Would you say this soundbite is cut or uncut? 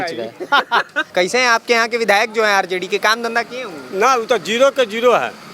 cut